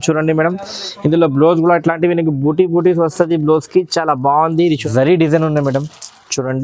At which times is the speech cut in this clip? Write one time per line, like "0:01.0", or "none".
0:04.8